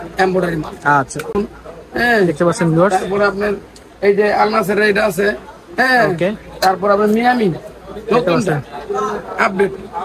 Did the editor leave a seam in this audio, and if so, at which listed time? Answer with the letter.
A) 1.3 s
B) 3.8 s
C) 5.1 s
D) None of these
A